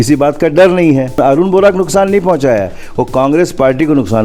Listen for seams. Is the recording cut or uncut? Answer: cut